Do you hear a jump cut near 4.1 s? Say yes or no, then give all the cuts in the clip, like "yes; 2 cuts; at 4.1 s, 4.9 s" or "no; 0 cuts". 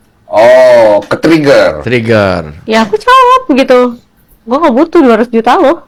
no; 0 cuts